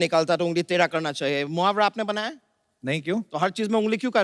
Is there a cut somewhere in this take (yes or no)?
no